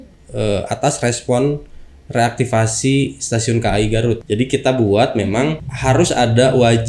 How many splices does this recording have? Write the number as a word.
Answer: two